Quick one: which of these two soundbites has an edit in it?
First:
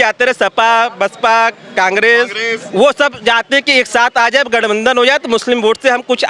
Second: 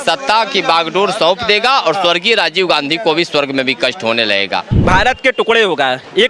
second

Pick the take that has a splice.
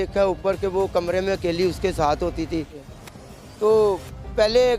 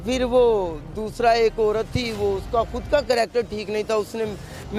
first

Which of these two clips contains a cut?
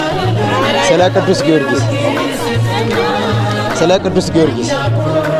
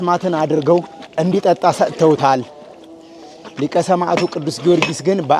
second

